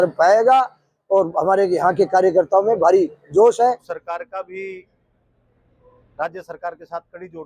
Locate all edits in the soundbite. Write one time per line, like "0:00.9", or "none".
0:03.9